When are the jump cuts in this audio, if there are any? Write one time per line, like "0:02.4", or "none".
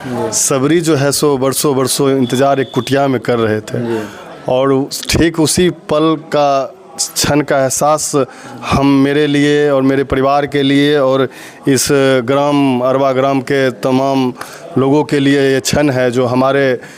none